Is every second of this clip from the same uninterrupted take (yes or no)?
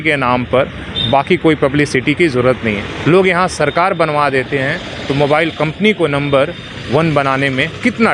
yes